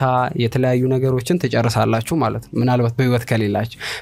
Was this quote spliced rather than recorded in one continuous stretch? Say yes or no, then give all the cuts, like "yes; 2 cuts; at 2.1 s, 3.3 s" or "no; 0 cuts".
no; 0 cuts